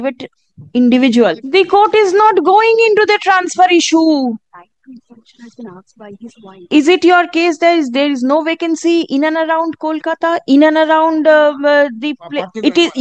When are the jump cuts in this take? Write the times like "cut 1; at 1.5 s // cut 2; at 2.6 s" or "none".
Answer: cut 1; at 1.4 s // cut 2; at 6.6 s